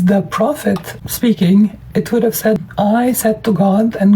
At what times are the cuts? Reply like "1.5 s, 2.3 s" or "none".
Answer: 0.9 s, 2.7 s